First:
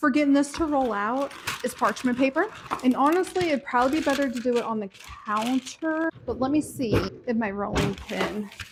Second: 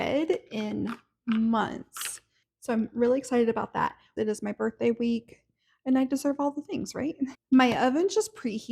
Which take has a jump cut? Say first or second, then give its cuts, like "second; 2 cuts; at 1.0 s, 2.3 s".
second; 2 cuts; at 4.0 s, 7.4 s